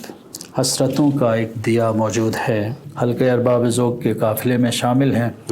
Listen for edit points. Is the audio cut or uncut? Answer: cut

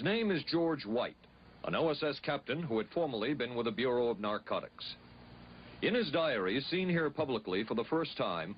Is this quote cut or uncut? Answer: uncut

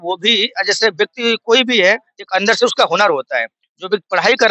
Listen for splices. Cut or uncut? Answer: uncut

